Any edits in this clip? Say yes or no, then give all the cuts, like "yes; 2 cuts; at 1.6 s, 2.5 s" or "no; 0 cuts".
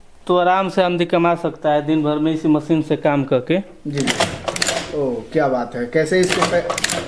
no; 0 cuts